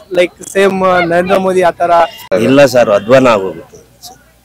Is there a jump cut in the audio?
yes; 1 cut; at 2.3 s

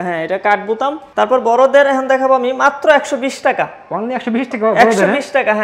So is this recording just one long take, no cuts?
no; 1 cut; at 1.0 s

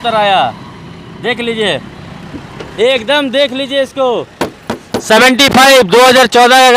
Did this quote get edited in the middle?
no; 0 cuts

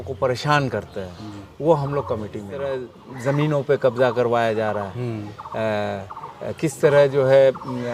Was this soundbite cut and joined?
yes; 1 cut; at 2.5 s

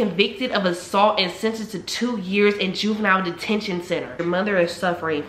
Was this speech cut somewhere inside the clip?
yes; 1 cut; at 4.1 s

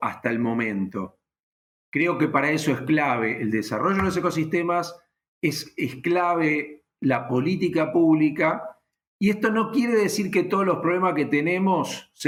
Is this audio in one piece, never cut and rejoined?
yes; 0 cuts

